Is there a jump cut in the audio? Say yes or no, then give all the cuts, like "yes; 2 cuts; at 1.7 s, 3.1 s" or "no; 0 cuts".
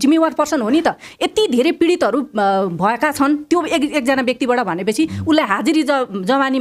no; 0 cuts